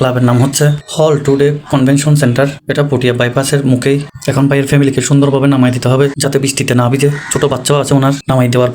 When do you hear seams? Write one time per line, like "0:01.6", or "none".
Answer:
none